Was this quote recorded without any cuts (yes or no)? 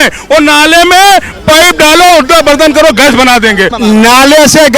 no